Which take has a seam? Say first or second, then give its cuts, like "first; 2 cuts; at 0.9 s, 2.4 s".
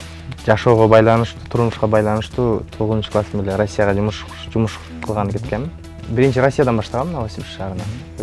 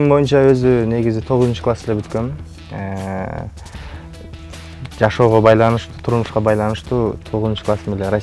first; 1 cut; at 5.9 s